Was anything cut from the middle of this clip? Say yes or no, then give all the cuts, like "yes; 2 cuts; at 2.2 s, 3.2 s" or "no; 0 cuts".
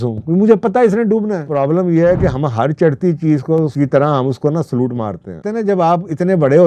yes; 3 cuts; at 1.4 s, 3.7 s, 5.5 s